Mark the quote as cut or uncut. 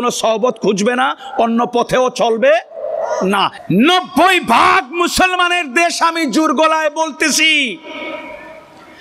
cut